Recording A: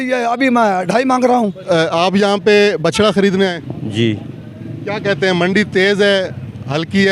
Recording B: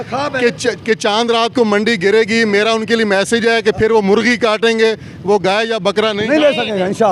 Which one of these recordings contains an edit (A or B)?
A